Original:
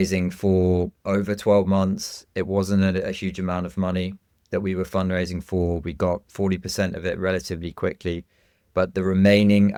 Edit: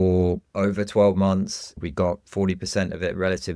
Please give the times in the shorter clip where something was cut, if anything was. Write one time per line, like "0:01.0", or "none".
0:01.8